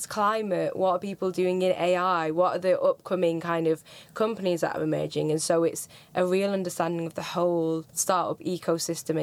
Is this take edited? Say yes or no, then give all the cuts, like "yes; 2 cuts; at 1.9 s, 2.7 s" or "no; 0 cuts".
yes; 1 cut; at 7.9 s